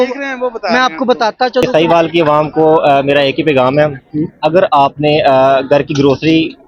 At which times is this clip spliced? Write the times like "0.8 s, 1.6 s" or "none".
1.7 s